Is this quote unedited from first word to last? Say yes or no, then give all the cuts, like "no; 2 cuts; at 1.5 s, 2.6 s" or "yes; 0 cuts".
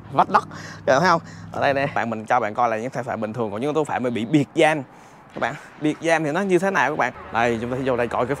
no; 2 cuts; at 2.0 s, 7.2 s